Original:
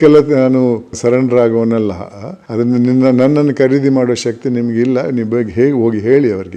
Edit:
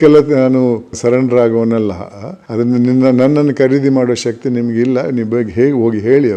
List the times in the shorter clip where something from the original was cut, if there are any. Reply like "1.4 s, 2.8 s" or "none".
none